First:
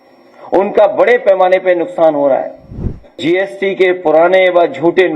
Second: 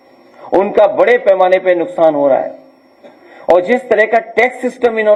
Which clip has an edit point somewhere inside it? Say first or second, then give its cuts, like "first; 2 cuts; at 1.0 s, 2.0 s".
first; 1 cut; at 3.2 s